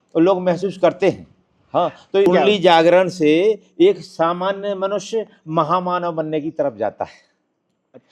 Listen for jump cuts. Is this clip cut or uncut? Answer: cut